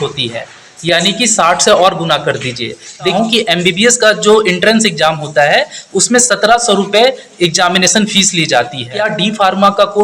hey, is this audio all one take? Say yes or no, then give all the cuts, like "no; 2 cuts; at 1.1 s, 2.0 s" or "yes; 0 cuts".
no; 2 cuts; at 3.1 s, 9.1 s